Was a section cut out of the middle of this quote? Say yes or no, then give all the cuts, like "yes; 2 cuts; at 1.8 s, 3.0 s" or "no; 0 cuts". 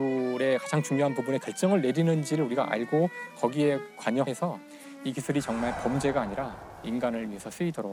no; 0 cuts